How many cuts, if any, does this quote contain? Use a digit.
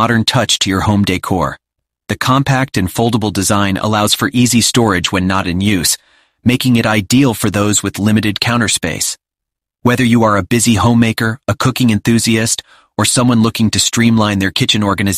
0